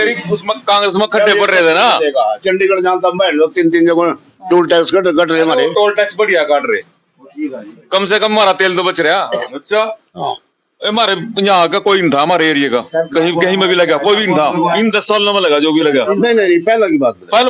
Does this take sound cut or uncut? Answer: cut